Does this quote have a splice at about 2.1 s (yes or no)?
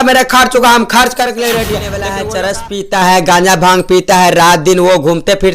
yes